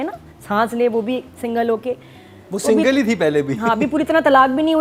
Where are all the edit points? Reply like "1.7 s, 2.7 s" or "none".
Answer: none